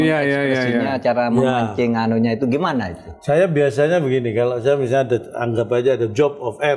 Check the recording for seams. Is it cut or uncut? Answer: uncut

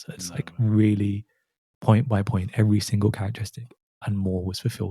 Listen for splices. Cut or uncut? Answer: cut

